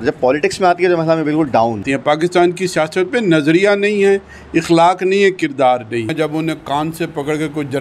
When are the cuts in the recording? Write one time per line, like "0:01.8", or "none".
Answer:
0:01.8
0:06.1